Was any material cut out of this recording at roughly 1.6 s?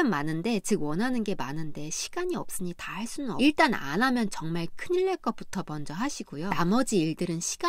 no; 2 cuts; at 3.4 s, 6.5 s

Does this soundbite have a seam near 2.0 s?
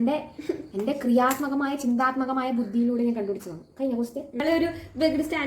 no; 1 cut; at 4.4 s

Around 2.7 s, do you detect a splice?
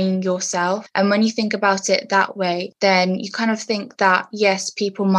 yes; 2 cuts; at 0.8 s, 2.7 s

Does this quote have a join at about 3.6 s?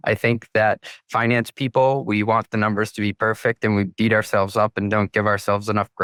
no; 0 cuts

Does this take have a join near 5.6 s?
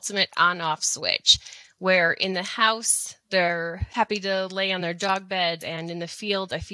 yes; 1 cut; at 5.6 s

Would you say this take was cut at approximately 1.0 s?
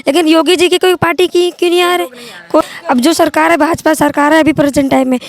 no; 1 cut; at 2.6 s

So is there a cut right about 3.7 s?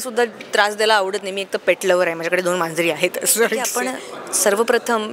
yes; 1 cut; at 3.7 s

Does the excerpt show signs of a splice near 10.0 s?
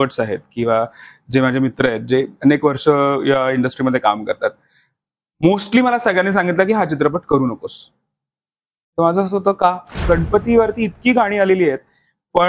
yes; 1 cut; at 10.0 s

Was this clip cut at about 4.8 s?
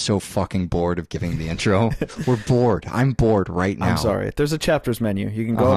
no; 1 cut; at 1.9 s

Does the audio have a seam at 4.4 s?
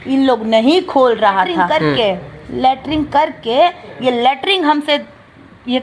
no; 1 cut; at 1.8 s

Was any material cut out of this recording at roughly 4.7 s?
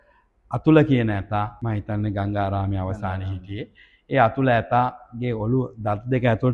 no; 1 cut; at 1.6 s

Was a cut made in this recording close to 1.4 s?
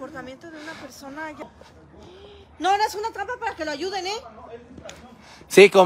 yes; 1 cut; at 1.4 s

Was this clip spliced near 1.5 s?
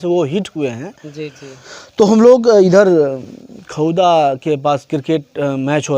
no; 0 cuts

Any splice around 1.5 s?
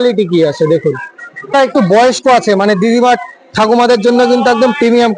yes; 1 cut; at 1.5 s

